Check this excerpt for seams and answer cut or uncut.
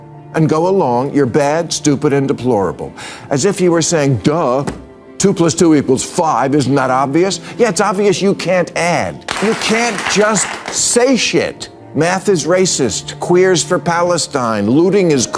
cut